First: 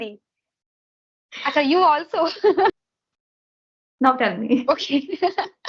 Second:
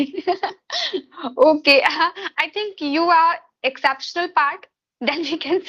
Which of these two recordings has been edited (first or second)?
first